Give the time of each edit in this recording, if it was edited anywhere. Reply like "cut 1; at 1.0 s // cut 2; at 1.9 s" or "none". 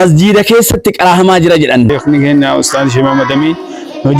cut 1; at 2.0 s